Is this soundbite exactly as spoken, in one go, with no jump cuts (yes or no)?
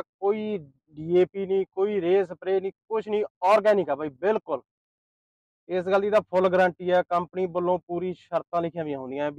yes